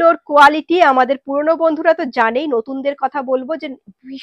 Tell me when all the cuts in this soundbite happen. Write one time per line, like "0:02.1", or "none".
none